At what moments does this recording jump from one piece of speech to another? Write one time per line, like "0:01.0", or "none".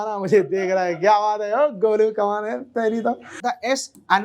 0:03.3